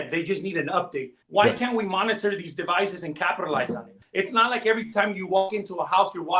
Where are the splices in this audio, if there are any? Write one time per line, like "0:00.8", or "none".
0:01.2
0:04.0

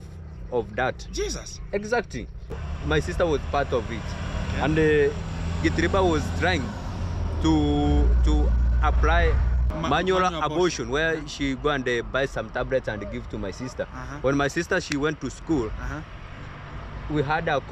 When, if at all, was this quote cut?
0:02.6
0:09.7

